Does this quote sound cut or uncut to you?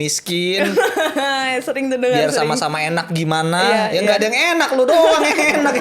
uncut